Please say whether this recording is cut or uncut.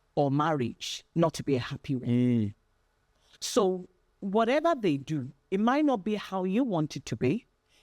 uncut